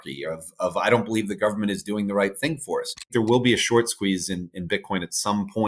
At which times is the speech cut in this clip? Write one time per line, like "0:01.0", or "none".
0:03.0